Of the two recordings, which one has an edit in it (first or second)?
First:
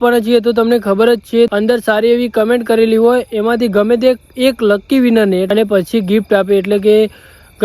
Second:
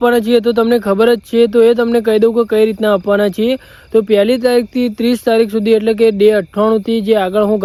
first